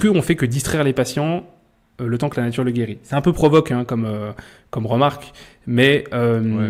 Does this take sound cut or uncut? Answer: uncut